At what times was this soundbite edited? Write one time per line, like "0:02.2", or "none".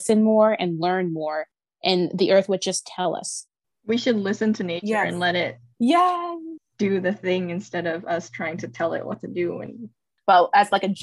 0:10.1